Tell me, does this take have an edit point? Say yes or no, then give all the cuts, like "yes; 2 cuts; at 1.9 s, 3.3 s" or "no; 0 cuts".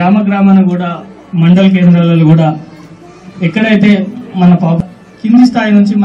yes; 1 cut; at 4.8 s